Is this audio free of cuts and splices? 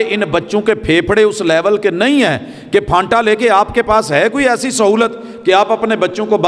yes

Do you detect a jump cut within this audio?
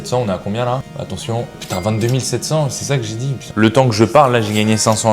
yes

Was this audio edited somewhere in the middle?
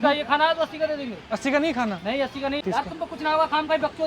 yes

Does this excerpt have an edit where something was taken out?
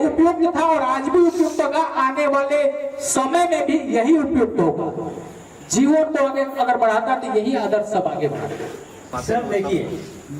yes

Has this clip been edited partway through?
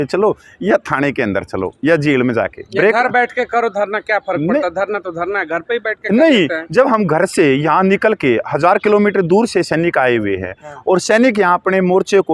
no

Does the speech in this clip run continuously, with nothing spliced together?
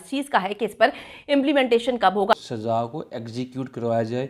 no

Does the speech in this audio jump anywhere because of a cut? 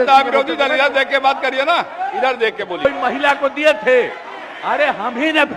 yes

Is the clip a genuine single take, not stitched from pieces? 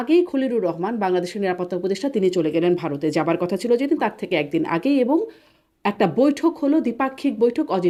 yes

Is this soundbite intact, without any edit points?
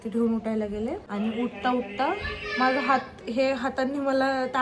no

